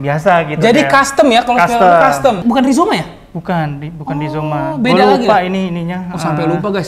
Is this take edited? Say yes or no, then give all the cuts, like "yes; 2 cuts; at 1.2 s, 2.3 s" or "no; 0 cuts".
yes; 1 cut; at 2.4 s